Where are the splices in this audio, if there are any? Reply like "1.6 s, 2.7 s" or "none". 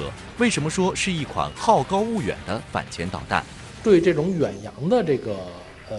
3.8 s